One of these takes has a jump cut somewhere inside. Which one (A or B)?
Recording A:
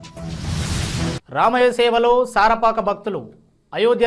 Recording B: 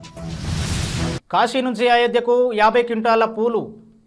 A